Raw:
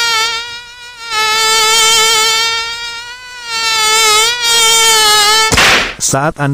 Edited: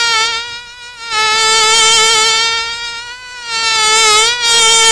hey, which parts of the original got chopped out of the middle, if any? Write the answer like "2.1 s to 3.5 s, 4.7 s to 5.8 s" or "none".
none